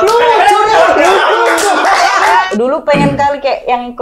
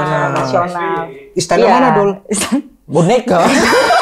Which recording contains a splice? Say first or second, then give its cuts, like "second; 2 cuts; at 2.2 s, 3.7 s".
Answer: first; 1 cut; at 2.5 s